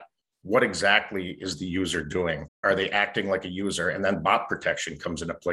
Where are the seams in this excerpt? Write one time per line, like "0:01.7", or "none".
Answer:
0:02.6